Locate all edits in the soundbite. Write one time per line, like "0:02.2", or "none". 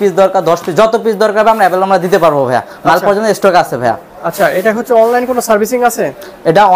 none